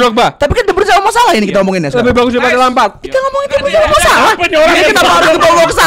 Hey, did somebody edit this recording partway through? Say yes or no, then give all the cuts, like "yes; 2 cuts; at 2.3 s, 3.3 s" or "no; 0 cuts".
yes; 1 cut; at 3.0 s